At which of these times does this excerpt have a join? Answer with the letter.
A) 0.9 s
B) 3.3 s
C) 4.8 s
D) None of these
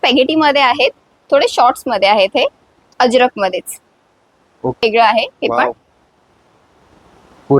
C